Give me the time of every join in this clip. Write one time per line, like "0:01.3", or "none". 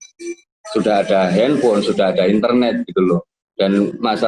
0:03.4